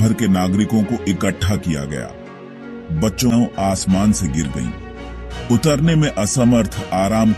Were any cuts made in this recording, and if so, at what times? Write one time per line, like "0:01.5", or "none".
0:03.3